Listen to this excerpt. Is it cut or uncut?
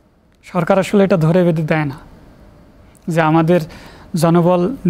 uncut